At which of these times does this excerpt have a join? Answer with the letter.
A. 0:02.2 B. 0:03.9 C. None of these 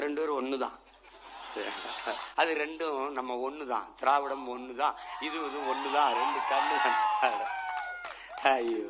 A